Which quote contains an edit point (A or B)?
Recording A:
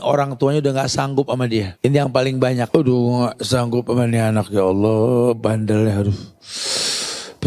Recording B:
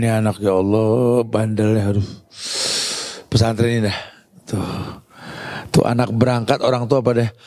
A